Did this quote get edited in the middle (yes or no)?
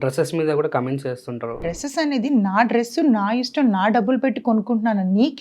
yes